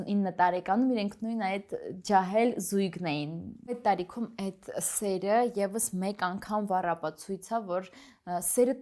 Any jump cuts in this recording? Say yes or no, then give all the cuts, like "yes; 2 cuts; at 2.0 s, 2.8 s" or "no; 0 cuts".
yes; 1 cut; at 3.5 s